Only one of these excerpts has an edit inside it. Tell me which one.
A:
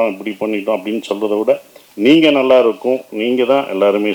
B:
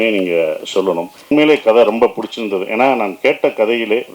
B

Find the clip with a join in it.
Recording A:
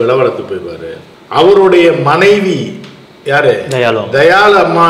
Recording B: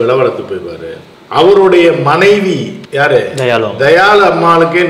B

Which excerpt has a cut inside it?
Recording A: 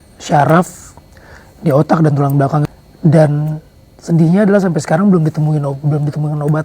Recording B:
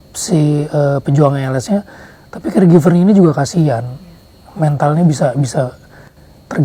A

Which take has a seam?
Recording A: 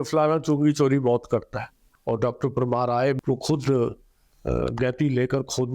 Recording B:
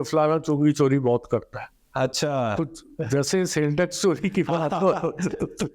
A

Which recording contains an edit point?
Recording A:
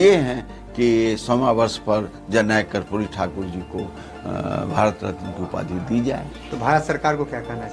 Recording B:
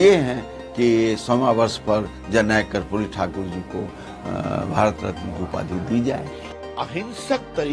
B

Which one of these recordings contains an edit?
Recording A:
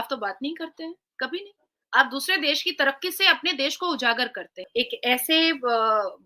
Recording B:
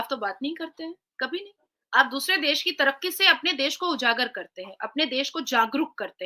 A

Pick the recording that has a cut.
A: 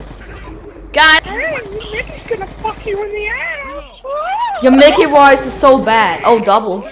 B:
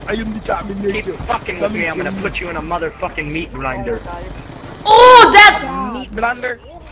A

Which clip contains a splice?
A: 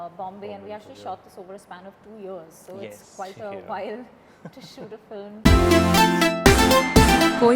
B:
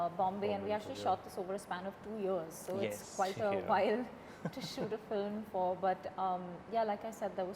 A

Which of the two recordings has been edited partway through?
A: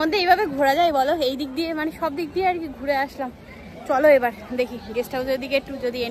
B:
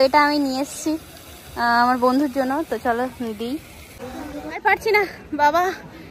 B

